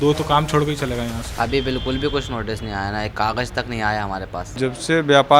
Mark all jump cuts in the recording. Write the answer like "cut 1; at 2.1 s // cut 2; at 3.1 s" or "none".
cut 1; at 1.2 s // cut 2; at 4.5 s